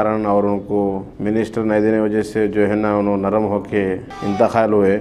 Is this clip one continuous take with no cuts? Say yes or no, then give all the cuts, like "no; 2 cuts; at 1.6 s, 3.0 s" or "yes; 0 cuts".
no; 2 cuts; at 1.1 s, 4.1 s